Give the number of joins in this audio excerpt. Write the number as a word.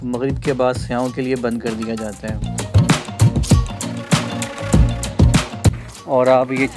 two